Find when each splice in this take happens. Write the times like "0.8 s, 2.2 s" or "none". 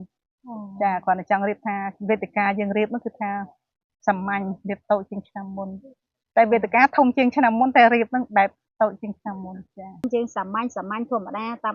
10.0 s